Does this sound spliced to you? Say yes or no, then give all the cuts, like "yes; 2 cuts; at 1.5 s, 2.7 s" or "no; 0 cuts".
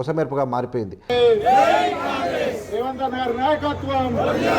yes; 1 cut; at 1.1 s